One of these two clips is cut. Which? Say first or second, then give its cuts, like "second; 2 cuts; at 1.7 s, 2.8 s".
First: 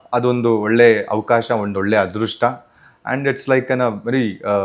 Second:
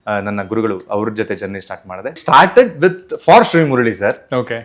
second; 1 cut; at 2.2 s